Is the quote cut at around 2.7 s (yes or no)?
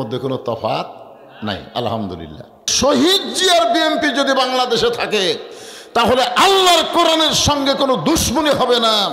yes